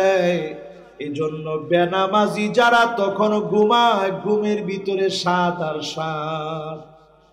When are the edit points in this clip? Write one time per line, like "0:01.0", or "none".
none